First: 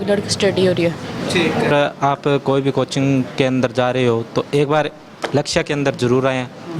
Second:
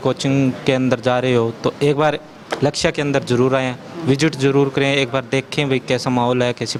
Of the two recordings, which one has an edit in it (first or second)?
first